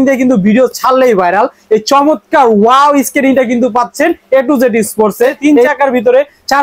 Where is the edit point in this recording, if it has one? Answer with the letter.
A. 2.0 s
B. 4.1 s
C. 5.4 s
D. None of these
C